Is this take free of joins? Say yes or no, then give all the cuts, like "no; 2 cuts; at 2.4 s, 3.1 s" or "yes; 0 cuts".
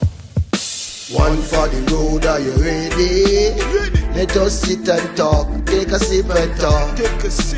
yes; 0 cuts